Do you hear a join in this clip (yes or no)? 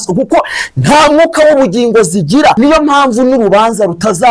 yes